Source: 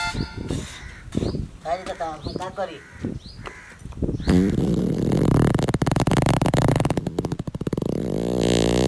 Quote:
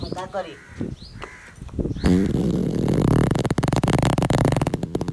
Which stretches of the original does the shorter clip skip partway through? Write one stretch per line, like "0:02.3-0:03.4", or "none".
none